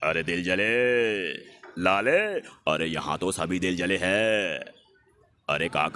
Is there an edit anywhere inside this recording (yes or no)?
no